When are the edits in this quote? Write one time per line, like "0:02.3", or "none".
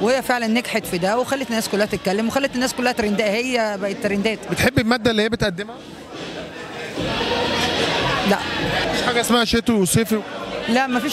0:04.5
0:08.8